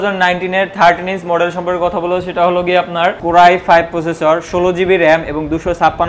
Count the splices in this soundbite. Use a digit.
1